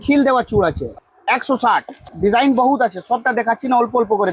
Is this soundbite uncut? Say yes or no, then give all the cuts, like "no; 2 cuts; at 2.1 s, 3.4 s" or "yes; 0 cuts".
no; 2 cuts; at 0.9 s, 2.1 s